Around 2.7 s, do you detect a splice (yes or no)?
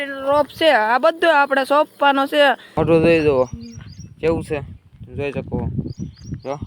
yes